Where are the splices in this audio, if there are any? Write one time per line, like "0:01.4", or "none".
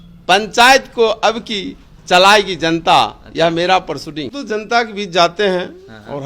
0:04.4